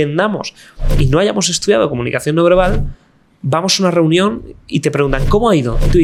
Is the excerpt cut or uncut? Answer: uncut